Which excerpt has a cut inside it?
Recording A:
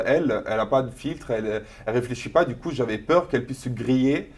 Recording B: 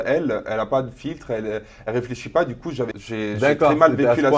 B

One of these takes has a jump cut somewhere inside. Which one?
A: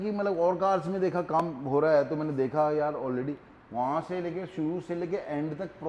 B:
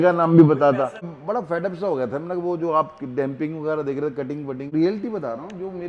B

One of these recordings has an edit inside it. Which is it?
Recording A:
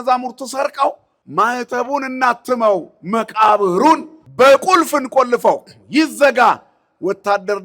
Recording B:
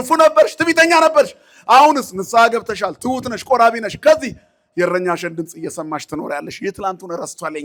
A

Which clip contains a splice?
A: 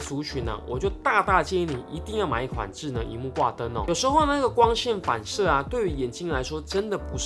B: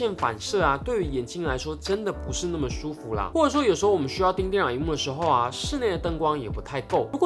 A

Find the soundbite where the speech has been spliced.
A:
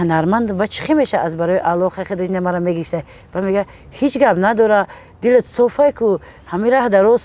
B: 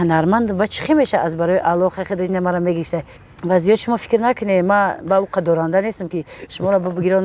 B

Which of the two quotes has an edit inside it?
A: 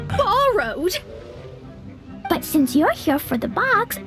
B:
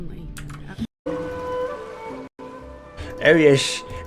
B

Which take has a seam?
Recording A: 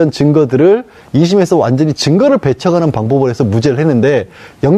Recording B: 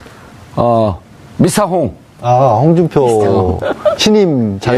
B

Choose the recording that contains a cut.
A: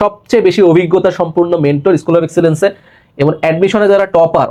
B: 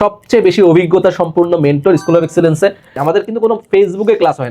B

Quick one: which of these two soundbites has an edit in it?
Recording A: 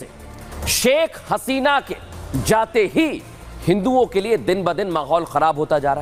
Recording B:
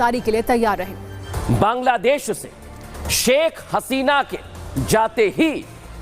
B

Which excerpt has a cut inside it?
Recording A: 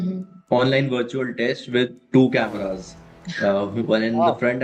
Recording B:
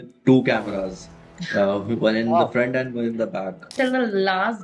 B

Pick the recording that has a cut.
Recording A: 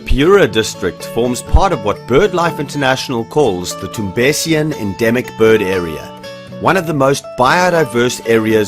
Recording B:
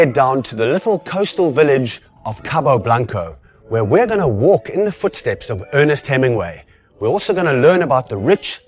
A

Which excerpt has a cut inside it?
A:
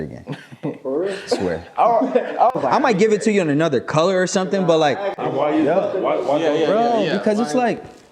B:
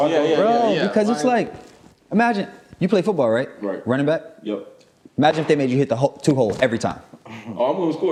A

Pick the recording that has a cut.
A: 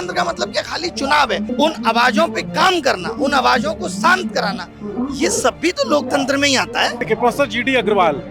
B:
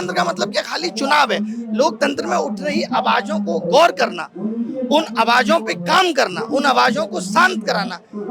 A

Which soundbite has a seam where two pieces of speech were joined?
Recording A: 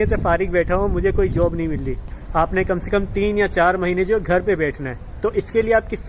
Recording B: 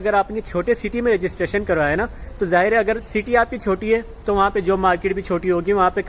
A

